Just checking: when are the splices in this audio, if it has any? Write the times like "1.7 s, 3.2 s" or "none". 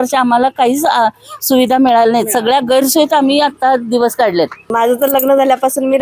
4.7 s